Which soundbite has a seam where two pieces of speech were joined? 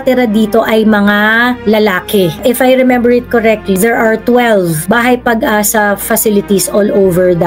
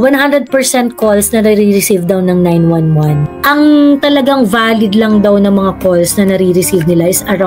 first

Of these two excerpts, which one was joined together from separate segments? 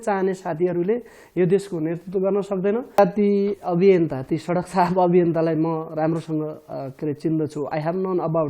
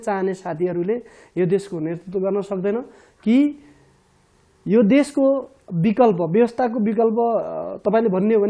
first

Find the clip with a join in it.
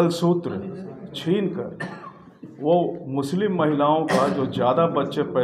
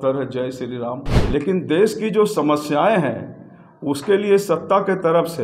second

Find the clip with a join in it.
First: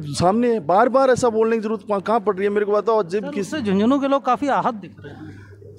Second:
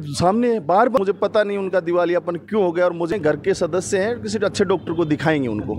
second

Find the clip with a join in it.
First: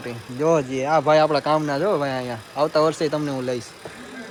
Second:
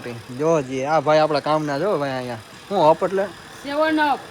second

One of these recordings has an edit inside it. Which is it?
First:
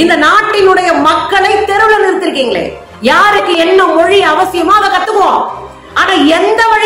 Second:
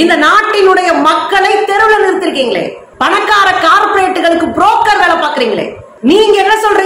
first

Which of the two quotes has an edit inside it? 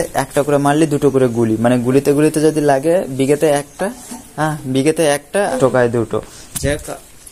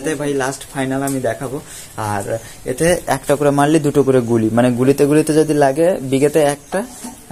first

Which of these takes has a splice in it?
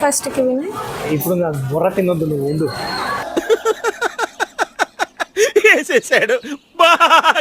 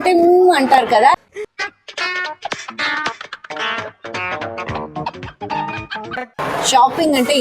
second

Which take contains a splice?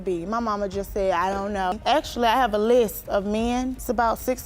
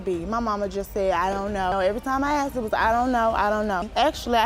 first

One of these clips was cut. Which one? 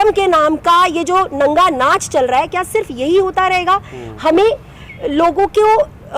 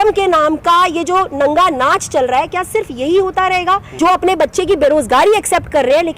second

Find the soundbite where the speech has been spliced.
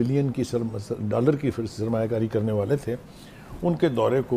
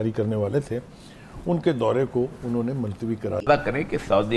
second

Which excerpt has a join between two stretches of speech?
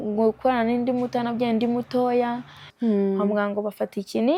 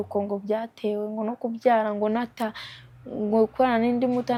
first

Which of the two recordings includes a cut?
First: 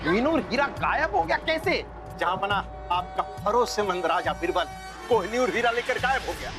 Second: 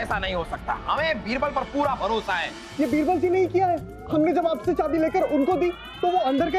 second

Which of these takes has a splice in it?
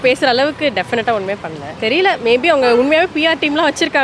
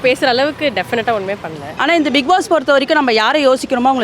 second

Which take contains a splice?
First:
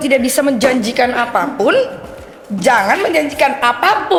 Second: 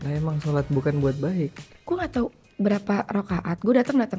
second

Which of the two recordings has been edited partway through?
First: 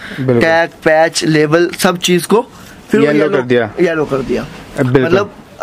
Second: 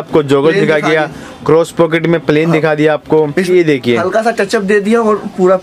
second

